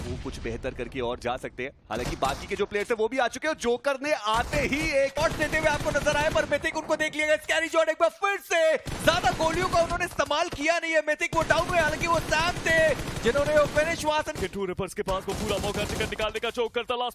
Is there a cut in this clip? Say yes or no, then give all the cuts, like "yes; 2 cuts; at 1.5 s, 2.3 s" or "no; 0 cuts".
yes; 2 cuts; at 5.2 s, 14.4 s